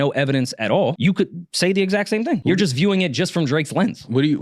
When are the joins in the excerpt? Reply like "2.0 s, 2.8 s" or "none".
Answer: 2.4 s